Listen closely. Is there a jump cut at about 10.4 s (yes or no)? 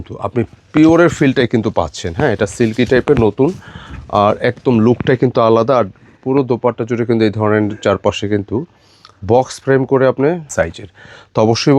yes